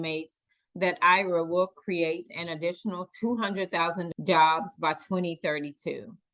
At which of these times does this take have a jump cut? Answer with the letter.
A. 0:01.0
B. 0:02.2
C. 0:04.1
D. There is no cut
C